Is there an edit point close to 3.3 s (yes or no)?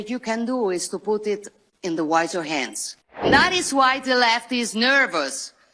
yes